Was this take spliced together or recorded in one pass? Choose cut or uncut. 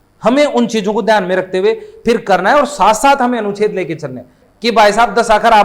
cut